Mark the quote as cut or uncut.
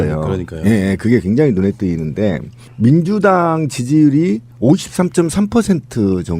cut